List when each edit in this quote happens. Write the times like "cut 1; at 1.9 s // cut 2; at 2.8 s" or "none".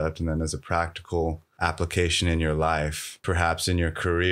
cut 1; at 1.5 s // cut 2; at 3.2 s